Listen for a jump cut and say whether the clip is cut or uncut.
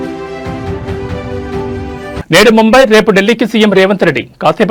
uncut